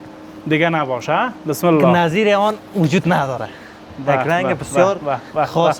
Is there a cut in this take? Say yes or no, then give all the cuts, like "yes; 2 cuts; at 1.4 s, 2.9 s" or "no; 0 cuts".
no; 0 cuts